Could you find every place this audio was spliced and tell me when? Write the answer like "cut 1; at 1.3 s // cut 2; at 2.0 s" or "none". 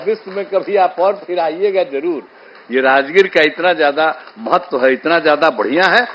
none